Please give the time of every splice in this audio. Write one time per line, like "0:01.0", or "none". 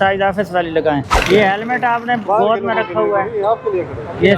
0:01.2